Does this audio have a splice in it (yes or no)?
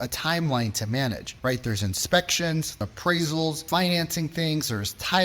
yes